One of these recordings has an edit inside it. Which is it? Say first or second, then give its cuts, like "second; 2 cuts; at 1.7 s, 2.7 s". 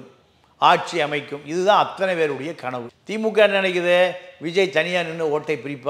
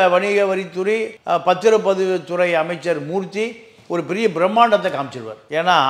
second; 1 cut; at 1.1 s